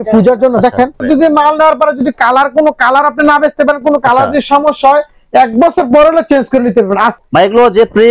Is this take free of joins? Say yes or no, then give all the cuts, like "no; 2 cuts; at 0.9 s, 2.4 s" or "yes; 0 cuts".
no; 2 cuts; at 1.0 s, 7.1 s